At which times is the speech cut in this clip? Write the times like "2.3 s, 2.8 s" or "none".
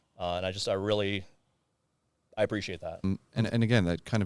3.0 s